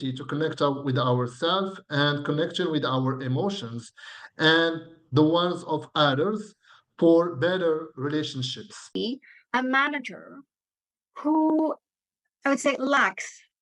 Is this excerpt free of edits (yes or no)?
no